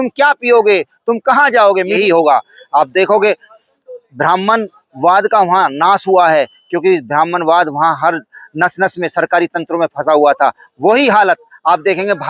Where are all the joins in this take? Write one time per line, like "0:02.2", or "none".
0:02.0